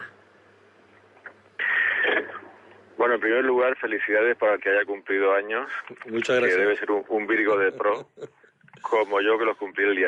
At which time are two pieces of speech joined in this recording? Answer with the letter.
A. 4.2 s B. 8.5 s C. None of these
A